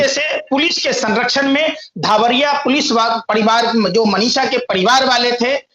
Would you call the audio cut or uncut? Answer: uncut